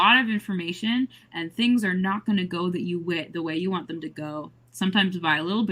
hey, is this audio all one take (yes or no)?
yes